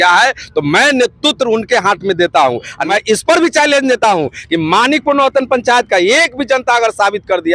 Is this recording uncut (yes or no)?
no